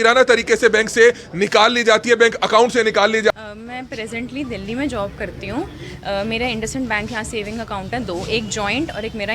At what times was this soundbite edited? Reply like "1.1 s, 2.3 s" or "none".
3.3 s